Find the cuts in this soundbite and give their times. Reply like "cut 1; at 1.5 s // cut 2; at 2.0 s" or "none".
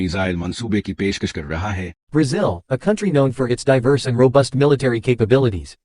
cut 1; at 1.9 s